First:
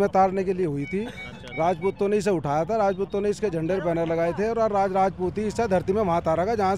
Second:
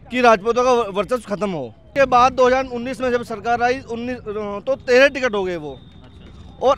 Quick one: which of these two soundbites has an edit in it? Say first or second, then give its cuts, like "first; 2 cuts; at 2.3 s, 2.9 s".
second; 1 cut; at 1.8 s